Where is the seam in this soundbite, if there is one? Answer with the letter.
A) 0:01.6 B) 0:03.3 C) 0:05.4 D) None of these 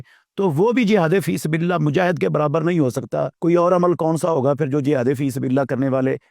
B